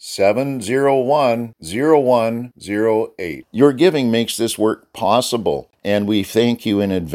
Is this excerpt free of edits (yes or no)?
no